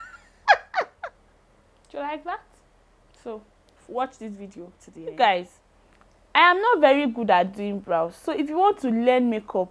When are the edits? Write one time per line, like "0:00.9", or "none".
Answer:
0:00.9
0:04.8